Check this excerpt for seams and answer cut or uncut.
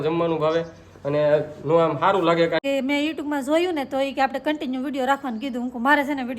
cut